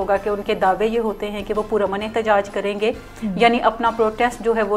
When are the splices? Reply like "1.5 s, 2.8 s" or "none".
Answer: none